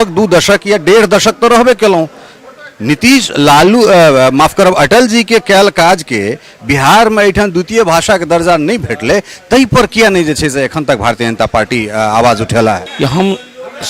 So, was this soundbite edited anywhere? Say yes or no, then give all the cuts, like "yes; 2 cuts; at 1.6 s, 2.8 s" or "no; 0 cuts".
yes; 1 cut; at 12.9 s